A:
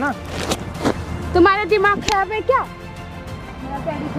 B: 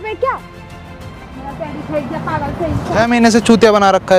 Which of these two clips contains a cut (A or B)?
B